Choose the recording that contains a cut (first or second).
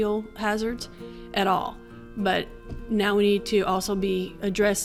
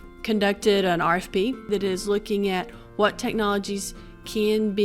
second